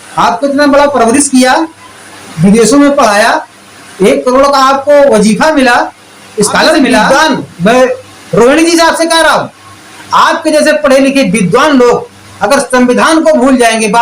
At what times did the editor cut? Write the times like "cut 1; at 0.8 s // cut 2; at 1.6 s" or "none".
cut 1; at 7.1 s